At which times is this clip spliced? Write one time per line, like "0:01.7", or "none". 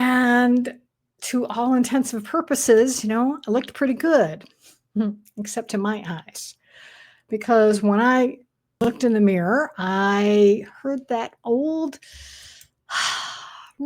0:08.8